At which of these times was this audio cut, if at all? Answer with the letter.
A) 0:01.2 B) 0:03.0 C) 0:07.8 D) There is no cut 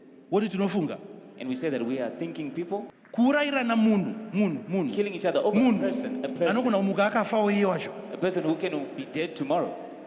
B